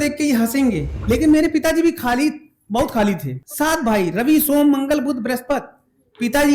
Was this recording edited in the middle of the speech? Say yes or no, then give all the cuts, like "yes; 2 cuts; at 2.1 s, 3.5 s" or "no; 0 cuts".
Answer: yes; 2 cuts; at 0.9 s, 3.4 s